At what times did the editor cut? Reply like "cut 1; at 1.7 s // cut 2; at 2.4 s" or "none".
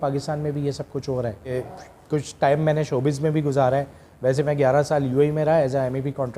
cut 1; at 1.5 s